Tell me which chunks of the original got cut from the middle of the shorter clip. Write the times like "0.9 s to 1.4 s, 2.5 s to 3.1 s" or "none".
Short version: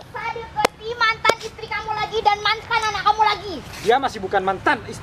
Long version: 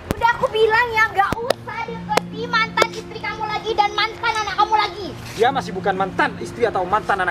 none